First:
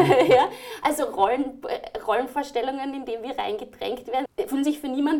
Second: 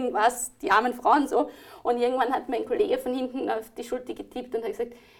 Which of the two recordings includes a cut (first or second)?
first